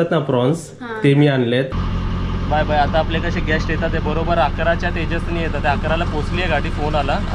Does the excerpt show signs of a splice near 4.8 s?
no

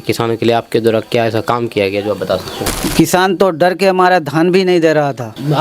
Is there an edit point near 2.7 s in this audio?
yes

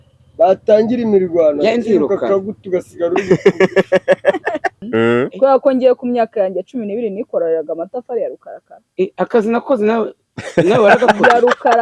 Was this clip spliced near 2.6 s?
no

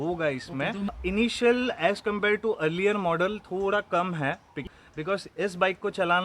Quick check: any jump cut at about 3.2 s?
no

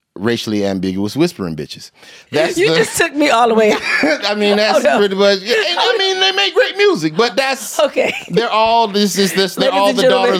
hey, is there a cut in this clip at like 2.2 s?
yes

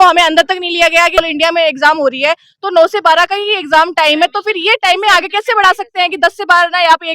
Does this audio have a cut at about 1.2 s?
yes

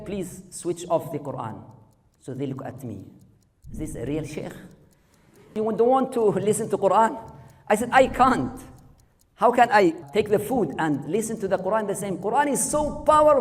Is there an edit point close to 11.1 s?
yes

